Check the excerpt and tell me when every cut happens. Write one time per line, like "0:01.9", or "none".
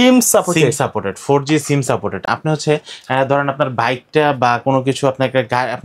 none